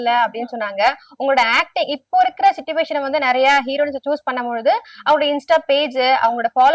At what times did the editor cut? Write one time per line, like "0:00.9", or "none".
none